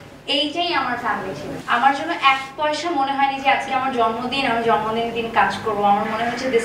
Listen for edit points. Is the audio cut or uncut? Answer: cut